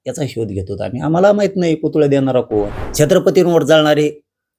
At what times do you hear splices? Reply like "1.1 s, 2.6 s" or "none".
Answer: 2.8 s